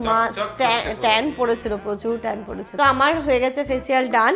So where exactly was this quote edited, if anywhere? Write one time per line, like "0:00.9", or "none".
0:02.6